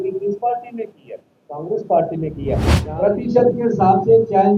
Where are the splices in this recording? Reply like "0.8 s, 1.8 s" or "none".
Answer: 2.8 s